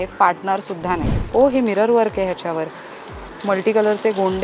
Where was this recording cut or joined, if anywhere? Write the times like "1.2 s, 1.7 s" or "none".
1.2 s